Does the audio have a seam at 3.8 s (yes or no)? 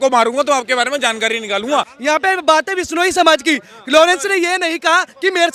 no